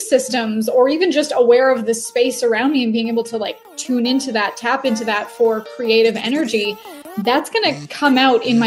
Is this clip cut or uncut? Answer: uncut